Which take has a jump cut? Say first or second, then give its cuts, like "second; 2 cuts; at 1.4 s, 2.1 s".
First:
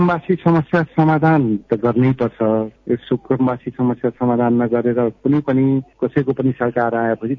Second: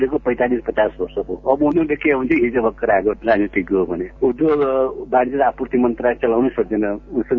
second; 1 cut; at 4.1 s